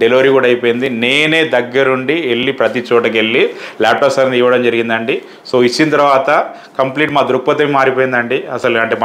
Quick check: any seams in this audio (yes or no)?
no